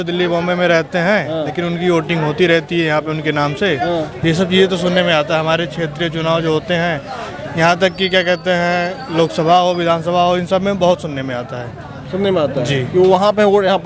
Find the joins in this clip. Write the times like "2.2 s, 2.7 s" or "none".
none